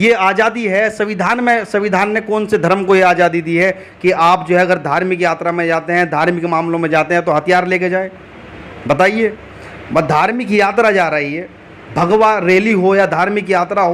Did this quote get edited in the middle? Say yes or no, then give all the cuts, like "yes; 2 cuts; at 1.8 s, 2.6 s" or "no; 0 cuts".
no; 0 cuts